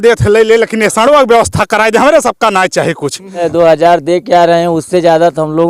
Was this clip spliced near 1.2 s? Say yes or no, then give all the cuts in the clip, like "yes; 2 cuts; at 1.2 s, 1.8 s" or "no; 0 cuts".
no; 1 cut; at 3.4 s